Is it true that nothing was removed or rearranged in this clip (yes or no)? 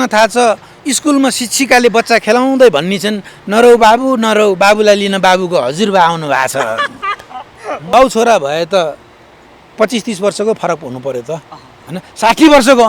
no